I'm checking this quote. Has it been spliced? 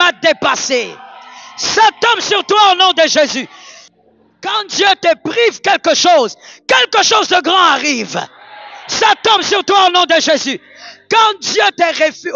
yes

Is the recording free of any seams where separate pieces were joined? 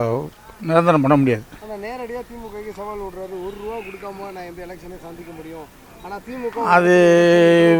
yes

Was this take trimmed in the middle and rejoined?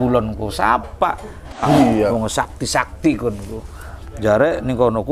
yes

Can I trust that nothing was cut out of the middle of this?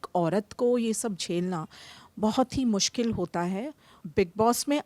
no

